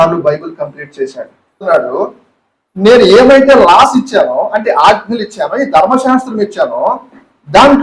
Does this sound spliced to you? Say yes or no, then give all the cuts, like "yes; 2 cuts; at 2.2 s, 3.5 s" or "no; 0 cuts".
yes; 1 cut; at 1.7 s